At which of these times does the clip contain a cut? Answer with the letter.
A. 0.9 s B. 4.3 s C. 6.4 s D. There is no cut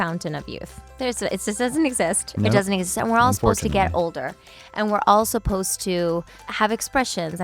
C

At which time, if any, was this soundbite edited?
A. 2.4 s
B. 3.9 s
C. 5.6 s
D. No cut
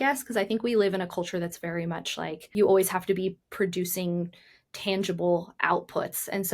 A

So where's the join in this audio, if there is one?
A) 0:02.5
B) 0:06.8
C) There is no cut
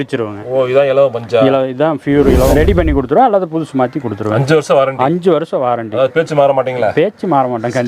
A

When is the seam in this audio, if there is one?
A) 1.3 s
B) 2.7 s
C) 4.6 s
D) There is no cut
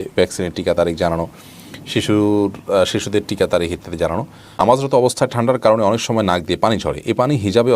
C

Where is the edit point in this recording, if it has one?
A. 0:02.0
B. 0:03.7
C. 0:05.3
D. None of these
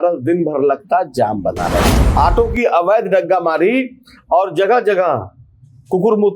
A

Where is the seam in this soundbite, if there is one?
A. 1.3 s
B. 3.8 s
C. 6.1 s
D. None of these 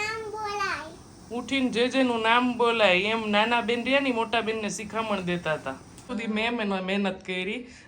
C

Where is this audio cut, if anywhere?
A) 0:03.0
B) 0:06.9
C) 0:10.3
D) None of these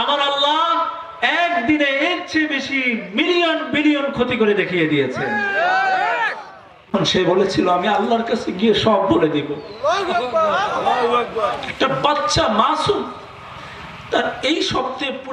B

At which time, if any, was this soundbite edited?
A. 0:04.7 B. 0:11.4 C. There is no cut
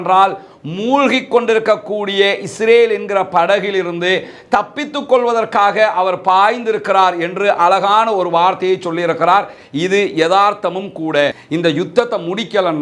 B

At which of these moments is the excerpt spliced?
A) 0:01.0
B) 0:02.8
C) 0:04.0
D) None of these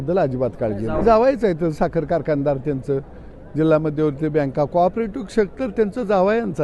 A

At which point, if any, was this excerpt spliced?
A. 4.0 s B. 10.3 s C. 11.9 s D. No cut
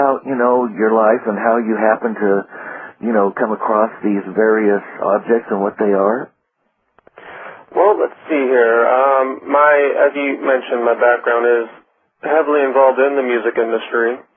A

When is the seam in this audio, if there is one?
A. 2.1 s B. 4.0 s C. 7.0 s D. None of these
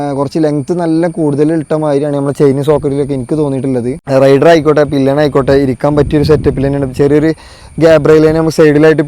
B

